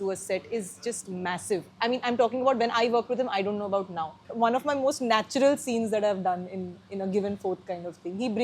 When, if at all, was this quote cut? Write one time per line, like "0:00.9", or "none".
0:04.3